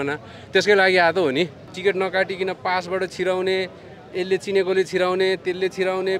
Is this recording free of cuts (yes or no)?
no